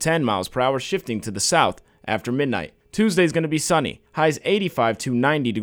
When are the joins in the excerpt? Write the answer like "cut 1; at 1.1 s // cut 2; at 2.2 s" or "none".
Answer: cut 1; at 2.8 s // cut 2; at 4.0 s